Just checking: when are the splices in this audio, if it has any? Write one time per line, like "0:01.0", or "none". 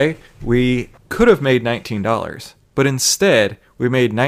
0:01.0